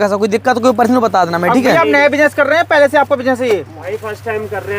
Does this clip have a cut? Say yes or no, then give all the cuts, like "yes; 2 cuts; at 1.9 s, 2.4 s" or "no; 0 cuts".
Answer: no; 0 cuts